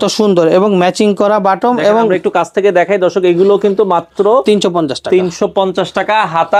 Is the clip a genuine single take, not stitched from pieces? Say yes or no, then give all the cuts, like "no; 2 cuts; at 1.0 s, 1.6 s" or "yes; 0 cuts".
yes; 0 cuts